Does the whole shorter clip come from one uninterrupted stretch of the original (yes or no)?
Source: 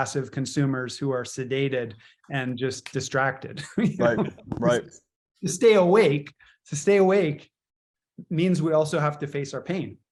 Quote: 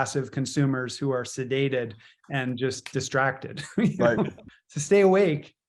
no